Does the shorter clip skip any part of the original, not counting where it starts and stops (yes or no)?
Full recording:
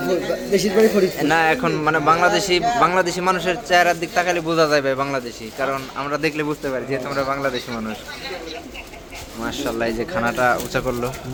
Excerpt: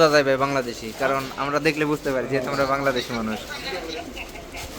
no